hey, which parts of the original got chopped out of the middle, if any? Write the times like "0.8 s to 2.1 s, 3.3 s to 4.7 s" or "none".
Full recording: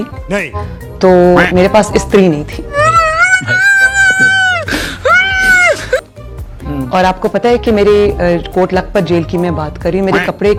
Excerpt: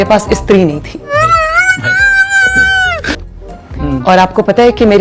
4.9 s to 6.1 s